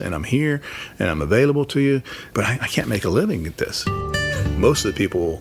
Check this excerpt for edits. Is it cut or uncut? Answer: cut